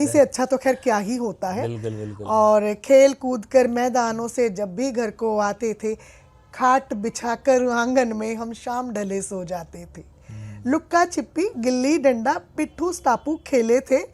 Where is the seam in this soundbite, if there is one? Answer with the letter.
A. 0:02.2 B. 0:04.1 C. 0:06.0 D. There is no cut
D